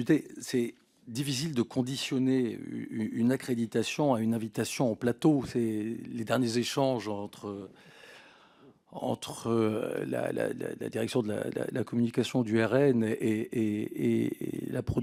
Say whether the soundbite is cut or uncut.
uncut